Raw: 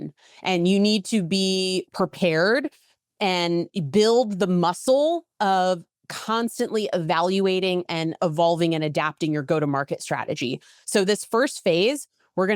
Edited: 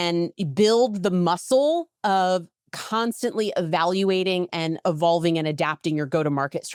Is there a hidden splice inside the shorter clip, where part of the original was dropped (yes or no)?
no